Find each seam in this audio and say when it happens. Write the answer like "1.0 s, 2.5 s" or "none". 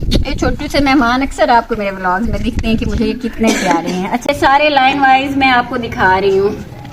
4.2 s